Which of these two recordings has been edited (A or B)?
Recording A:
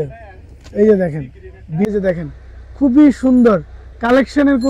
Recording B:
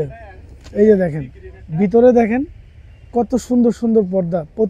A